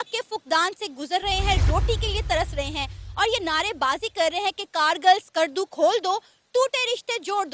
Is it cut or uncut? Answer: uncut